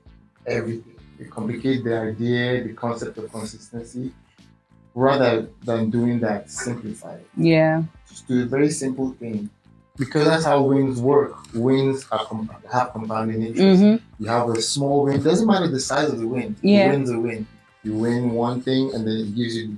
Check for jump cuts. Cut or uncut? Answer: cut